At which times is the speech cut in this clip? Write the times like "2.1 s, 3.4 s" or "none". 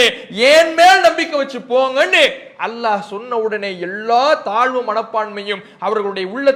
none